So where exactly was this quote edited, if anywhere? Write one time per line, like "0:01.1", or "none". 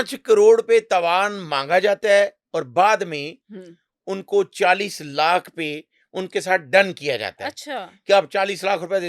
none